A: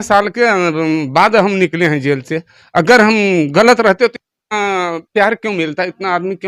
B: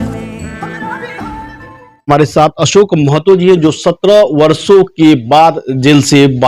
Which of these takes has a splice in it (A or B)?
B